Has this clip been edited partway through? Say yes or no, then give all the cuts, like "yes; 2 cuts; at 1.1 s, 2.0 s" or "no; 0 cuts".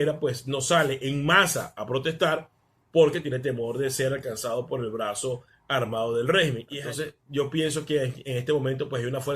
yes; 1 cut; at 6.7 s